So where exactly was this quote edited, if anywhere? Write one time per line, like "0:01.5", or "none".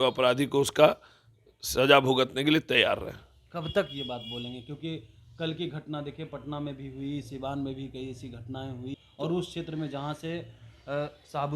0:09.0